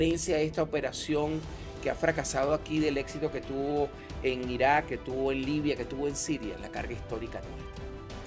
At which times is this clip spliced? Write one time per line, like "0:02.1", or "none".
none